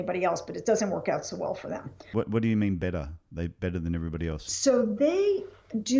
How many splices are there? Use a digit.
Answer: 2